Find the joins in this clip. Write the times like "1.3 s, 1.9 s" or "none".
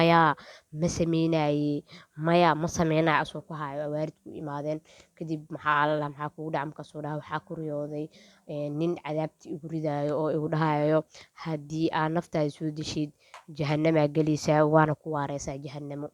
none

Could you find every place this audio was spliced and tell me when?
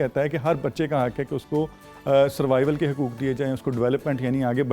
none

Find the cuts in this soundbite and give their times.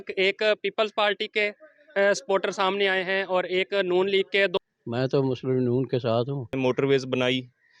4.6 s, 6.5 s

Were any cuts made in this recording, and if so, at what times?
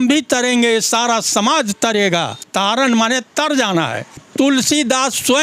2.4 s, 4.2 s

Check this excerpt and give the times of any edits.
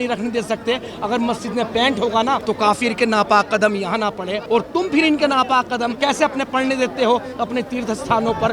2.4 s, 4.4 s, 5.9 s

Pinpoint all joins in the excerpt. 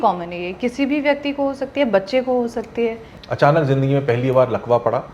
3.1 s

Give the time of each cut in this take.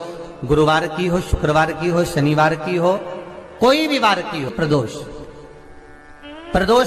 4.5 s

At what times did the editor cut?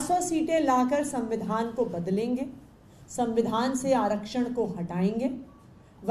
none

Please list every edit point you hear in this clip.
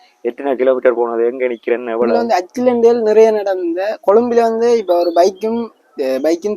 2.2 s

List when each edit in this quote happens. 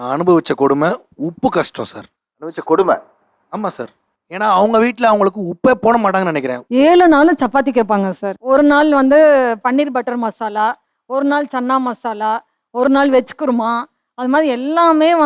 6.5 s

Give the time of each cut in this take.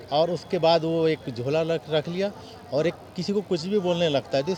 none

